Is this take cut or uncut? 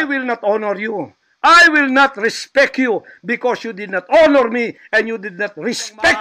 uncut